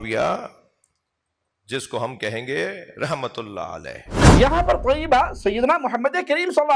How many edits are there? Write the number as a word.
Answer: one